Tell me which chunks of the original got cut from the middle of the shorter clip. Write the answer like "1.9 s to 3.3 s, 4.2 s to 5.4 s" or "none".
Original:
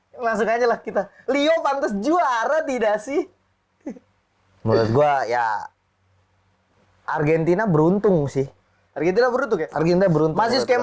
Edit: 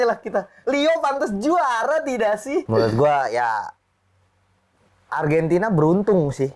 3.3 s to 4.6 s